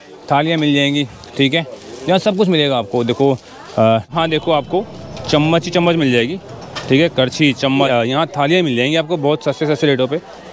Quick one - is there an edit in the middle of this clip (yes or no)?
yes